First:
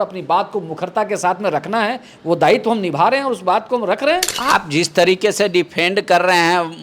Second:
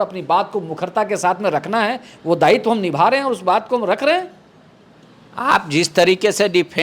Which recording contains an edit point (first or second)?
first